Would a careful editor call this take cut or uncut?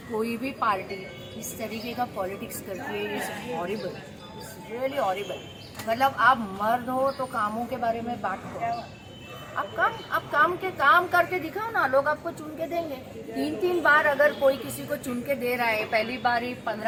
uncut